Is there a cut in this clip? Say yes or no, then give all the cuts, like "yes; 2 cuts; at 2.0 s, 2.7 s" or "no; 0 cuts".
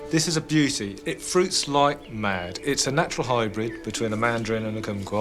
no; 0 cuts